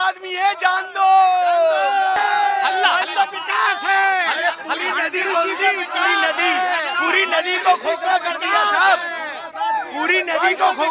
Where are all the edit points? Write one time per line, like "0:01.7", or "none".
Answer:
0:02.2